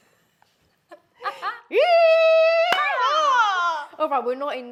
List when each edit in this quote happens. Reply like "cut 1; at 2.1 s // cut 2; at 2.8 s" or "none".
none